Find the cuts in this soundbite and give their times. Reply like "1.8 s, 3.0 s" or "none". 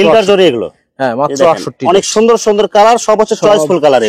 none